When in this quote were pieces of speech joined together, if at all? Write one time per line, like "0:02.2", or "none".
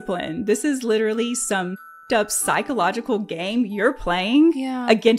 0:02.0